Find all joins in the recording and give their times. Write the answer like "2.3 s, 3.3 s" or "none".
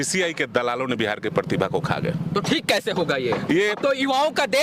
none